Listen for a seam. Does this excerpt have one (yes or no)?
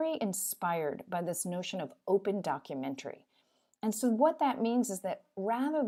no